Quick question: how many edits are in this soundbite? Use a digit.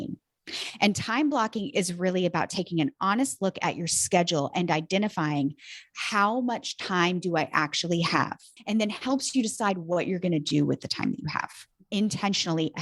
1